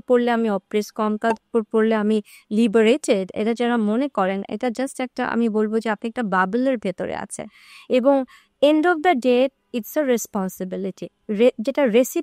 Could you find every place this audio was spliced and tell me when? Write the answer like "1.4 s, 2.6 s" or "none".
none